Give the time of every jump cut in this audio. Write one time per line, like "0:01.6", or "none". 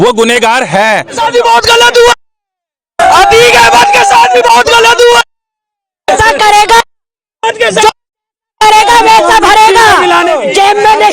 0:01.1
0:10.3